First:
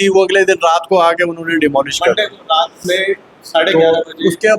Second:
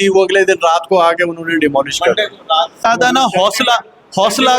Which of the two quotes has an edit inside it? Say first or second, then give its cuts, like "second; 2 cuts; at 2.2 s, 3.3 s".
second; 1 cut; at 2.8 s